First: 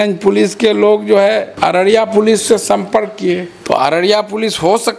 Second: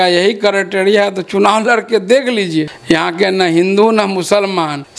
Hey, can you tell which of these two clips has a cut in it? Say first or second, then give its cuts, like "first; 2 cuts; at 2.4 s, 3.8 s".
first; 1 cut; at 3.5 s